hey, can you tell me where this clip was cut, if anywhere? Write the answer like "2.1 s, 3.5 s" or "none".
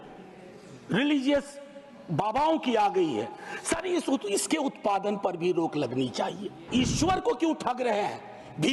6.6 s

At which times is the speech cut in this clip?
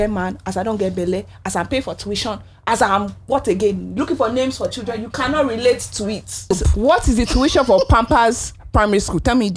6.5 s

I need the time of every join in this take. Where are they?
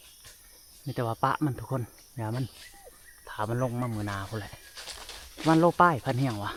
none

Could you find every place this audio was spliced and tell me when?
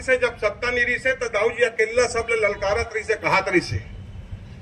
none

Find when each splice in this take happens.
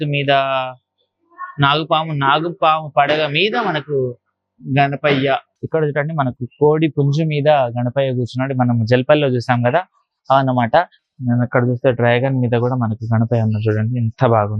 5.5 s, 11.0 s

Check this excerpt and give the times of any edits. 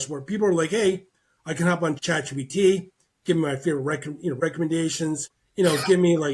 2.0 s, 4.4 s, 5.4 s

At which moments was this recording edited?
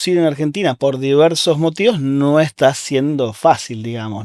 0.8 s, 2.5 s

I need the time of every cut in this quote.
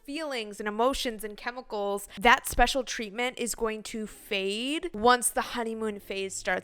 2.1 s, 4.9 s

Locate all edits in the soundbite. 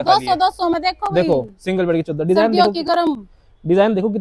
none

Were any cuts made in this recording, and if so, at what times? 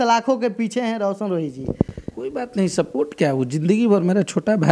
none

